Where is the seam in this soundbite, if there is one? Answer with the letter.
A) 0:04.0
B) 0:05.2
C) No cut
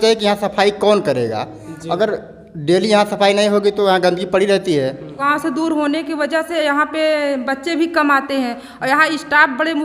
B